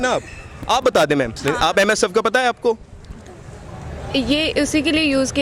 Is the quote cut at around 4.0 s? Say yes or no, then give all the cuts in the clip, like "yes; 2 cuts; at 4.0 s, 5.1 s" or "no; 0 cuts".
no; 1 cut; at 1.4 s